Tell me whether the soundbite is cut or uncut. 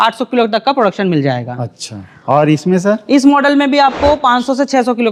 uncut